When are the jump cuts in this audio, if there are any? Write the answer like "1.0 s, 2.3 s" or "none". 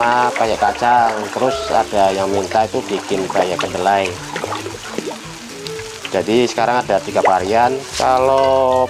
7.9 s

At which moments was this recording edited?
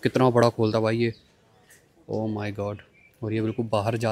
none

